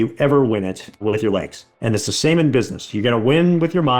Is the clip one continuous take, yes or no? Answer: no